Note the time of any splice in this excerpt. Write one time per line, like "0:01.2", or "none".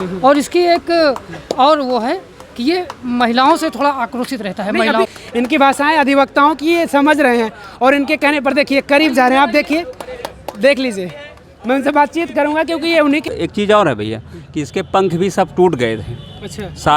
0:05.1
0:13.3